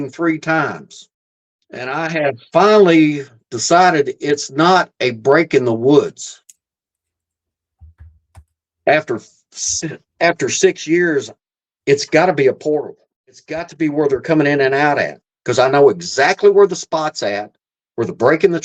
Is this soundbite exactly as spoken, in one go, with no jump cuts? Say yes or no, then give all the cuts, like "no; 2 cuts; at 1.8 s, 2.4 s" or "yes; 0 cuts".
no; 2 cuts; at 1.8 s, 13.7 s